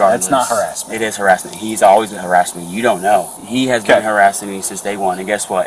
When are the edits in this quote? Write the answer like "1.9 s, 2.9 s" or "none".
3.3 s